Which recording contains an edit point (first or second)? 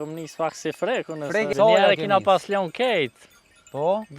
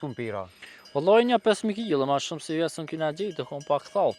first